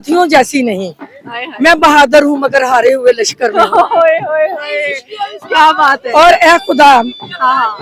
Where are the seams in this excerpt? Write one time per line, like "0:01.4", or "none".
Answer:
none